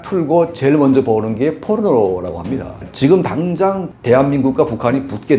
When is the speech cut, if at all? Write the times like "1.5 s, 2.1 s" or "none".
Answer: 2.8 s